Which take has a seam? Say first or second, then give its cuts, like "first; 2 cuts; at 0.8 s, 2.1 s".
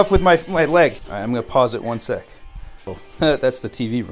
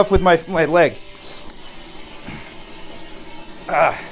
first; 2 cuts; at 1.1 s, 3.0 s